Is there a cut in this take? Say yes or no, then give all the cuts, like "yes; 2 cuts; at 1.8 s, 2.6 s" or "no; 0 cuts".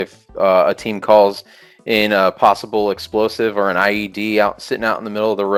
no; 0 cuts